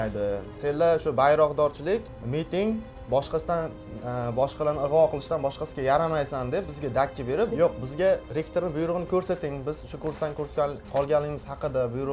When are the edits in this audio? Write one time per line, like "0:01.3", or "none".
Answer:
0:07.5